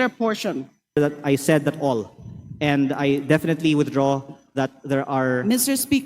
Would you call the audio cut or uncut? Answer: cut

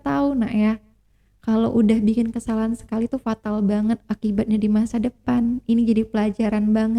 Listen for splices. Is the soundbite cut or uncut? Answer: uncut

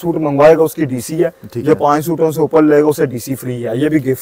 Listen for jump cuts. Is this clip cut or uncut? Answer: uncut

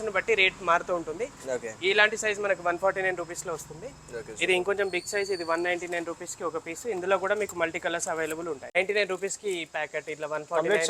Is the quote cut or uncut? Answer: cut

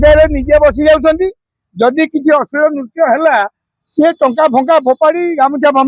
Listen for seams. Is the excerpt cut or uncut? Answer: uncut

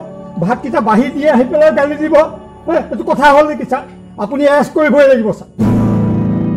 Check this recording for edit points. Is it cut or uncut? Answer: cut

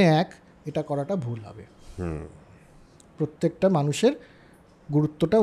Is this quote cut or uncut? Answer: uncut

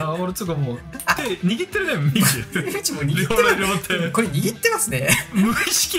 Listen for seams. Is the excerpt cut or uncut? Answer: uncut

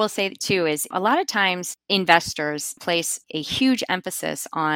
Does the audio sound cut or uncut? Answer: cut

